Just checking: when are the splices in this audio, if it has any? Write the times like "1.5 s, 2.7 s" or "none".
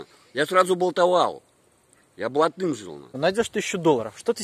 3.1 s

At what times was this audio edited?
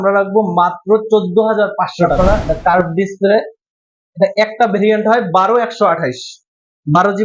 2.1 s

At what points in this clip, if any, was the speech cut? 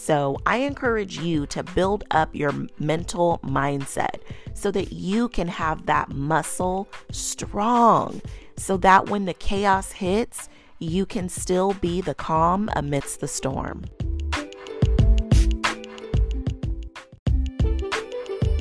13.9 s, 17.1 s

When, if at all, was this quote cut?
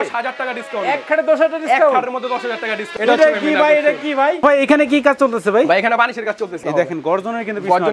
3.0 s, 4.4 s, 6.6 s

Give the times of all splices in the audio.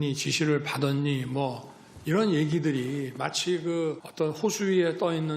4.1 s

